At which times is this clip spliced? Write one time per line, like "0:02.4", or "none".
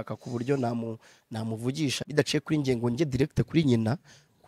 0:02.0

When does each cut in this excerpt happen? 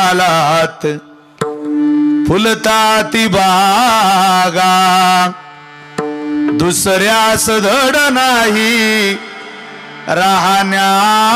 none

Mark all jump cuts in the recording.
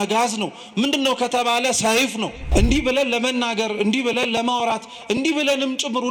0:02.4

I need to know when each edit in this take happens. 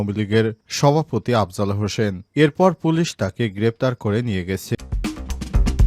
0:04.8

